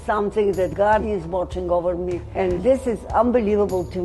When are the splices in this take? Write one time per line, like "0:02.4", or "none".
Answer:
0:00.8
0:02.4